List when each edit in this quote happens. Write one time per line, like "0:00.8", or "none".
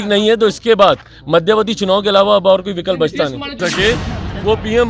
0:03.6